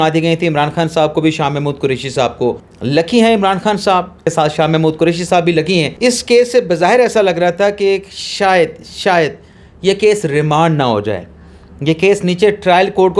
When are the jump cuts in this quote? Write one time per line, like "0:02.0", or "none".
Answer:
0:02.7
0:04.2
0:05.9

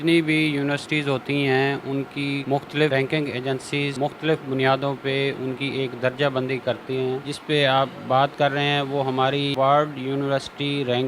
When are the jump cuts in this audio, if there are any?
0:02.9
0:03.9
0:07.3
0:09.5

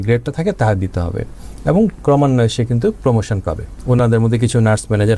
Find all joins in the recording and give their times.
0:03.7

